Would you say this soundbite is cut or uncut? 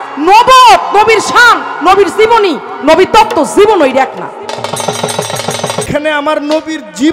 cut